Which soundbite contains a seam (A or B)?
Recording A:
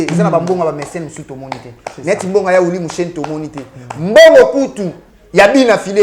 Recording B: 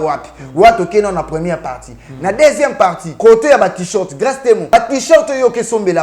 B